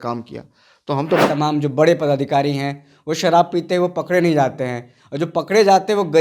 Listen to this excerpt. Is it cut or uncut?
cut